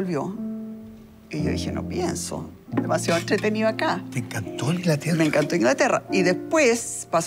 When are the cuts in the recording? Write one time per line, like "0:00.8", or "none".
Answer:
none